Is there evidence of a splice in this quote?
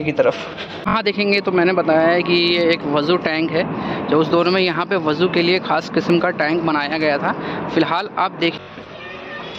yes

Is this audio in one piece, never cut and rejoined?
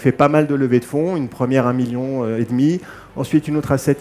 yes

